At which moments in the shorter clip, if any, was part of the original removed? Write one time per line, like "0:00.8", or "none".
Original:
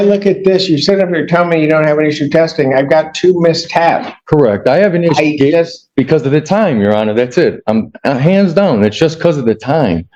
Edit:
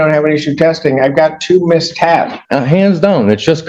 0:02.4